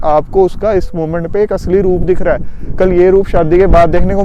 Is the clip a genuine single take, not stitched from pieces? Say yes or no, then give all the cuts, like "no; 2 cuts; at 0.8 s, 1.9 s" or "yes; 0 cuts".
yes; 0 cuts